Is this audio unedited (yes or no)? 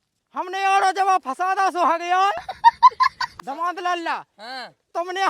no